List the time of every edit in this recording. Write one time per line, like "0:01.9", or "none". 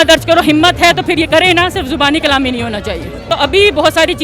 0:03.3